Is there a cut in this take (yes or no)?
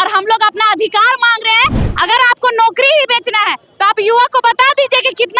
yes